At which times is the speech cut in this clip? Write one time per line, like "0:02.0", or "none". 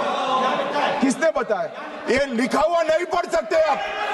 none